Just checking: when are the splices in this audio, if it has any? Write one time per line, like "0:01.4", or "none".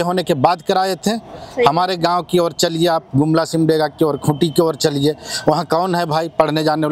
none